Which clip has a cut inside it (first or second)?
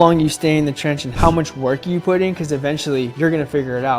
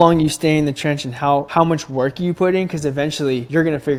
first